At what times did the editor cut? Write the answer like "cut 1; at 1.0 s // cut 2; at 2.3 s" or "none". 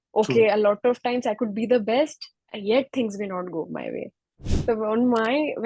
cut 1; at 4.4 s